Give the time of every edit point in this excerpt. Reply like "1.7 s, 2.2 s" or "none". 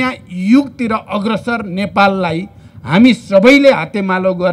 none

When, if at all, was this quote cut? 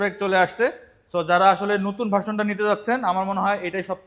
none

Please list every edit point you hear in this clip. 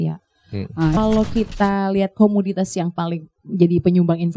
1.0 s

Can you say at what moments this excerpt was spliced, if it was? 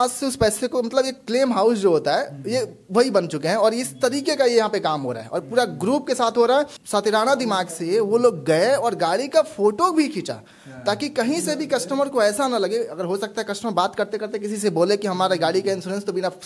6.8 s

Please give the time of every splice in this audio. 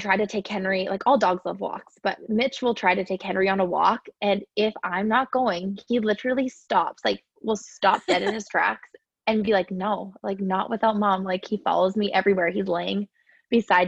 none

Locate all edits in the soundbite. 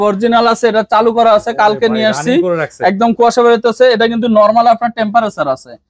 none

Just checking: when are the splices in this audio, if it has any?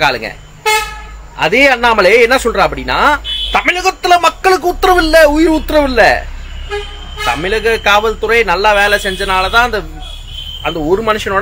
none

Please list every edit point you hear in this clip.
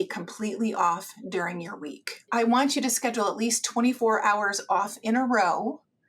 2.3 s, 4.0 s

